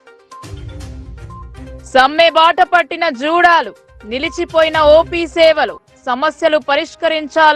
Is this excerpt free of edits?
no; 1 cut; at 1.8 s

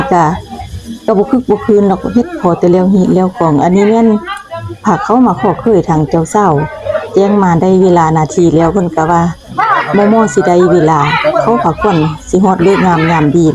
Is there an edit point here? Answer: no; 0 cuts

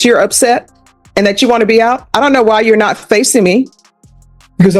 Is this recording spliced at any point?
no; 0 cuts

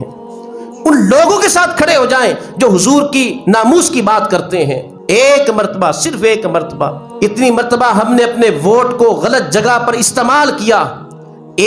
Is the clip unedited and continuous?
no; 2 cuts; at 4.9 s, 7.0 s

